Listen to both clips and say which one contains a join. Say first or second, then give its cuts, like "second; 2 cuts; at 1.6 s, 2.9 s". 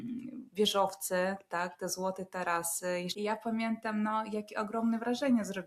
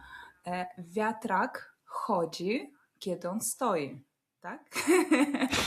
first; 1 cut; at 3.1 s